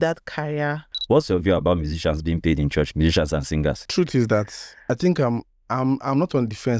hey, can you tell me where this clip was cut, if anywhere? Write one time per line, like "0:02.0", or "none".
0:00.9
0:03.9
0:04.6